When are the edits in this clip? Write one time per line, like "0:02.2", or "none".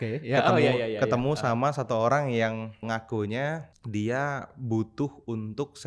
0:02.8
0:03.7